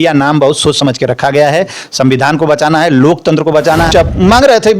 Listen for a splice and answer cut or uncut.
cut